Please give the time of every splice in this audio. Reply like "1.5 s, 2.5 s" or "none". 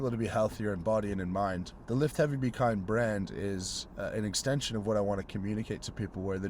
1.7 s

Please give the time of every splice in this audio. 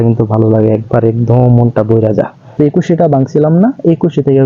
2.4 s

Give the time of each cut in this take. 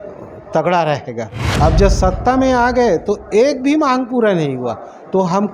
1.4 s

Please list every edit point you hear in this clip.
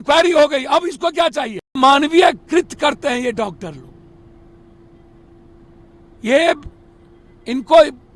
1.8 s

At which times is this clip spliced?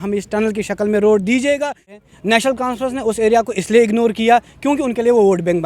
1.9 s

